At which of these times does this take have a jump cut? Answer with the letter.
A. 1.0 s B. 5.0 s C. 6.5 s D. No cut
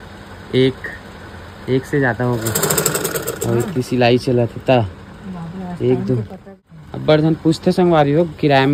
C